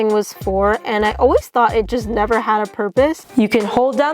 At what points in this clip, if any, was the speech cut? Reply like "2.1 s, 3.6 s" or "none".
3.2 s